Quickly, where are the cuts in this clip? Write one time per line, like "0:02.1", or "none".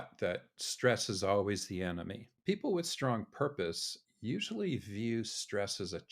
0:02.3

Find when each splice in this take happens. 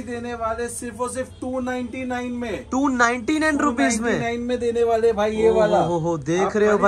none

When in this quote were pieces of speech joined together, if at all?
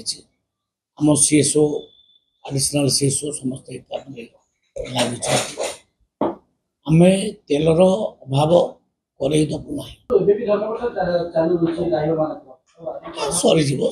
0:10.1

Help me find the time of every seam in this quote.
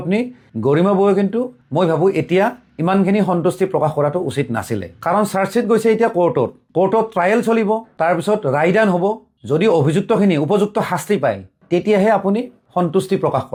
none

